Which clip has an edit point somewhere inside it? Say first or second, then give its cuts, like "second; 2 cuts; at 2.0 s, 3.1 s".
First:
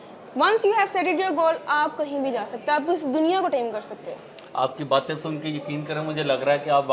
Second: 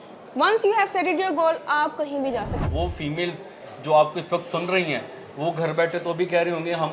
second; 1 cut; at 2.6 s